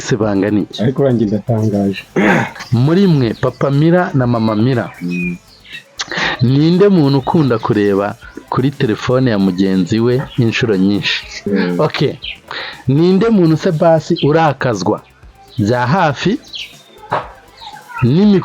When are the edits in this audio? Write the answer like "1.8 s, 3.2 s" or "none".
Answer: 2.6 s, 11.4 s

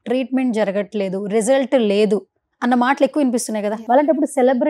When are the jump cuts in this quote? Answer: 3.8 s

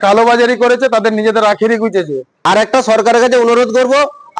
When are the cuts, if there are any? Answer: 2.2 s

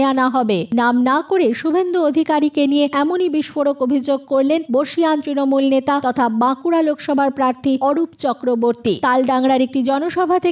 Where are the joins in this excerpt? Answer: 2.9 s, 4.6 s, 6.0 s, 7.8 s, 9.0 s

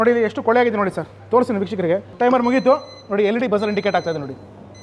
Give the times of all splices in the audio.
2.1 s

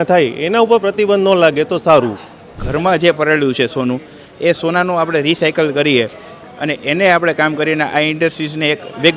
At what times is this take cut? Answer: 2.6 s

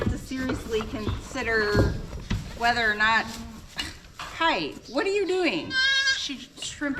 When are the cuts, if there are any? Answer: none

